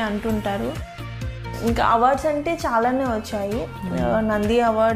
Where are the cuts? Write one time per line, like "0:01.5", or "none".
0:01.4